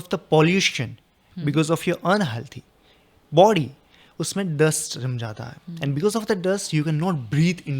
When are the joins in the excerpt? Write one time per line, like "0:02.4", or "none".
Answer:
none